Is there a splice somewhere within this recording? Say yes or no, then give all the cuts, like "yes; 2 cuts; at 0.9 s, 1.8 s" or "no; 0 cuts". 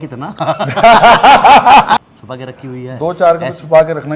yes; 1 cut; at 2.0 s